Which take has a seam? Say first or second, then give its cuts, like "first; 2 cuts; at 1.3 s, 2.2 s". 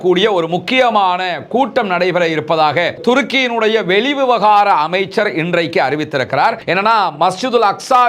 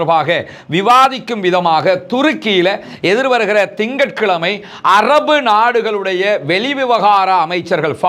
first; 1 cut; at 6.6 s